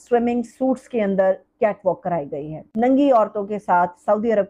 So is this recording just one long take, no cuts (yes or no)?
no